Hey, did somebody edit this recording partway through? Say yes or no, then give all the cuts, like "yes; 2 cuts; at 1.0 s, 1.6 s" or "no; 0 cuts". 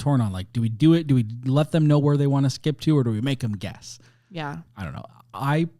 no; 0 cuts